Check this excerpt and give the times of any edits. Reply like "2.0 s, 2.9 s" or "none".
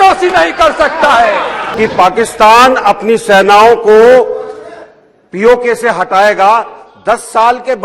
1.6 s